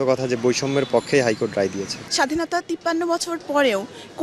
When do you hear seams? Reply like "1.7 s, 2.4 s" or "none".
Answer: 2.0 s

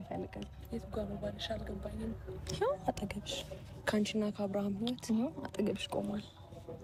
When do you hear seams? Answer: none

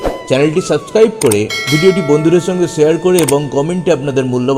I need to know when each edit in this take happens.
1.6 s

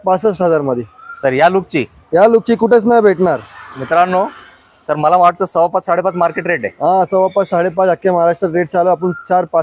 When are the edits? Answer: none

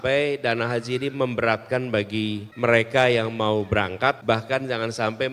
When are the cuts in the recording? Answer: 2.5 s, 4.2 s

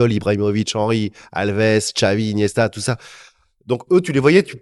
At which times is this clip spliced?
none

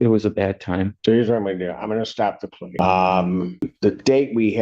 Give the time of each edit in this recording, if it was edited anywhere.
0.9 s, 2.6 s, 3.7 s

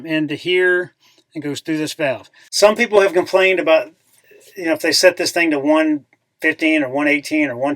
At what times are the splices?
2.4 s

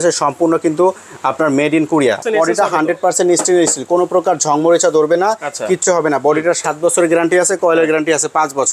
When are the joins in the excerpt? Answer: 2.2 s

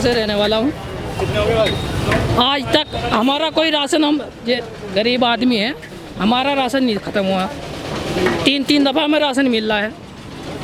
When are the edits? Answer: none

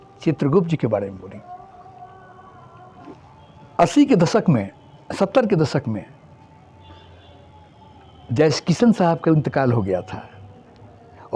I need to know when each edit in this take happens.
3.1 s

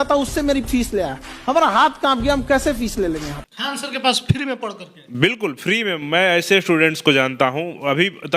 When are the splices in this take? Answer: 3.3 s

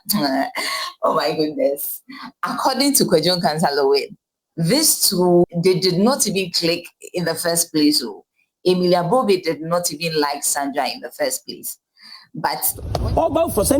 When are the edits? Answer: 12.9 s

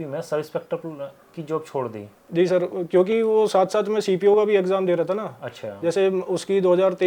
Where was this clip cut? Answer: none

